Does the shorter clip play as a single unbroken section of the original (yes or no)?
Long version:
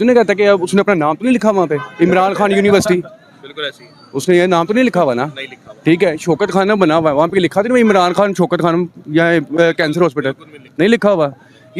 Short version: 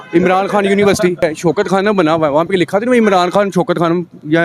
no